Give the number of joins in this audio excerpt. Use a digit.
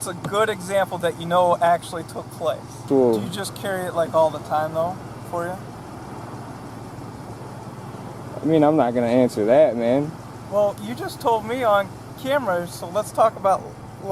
1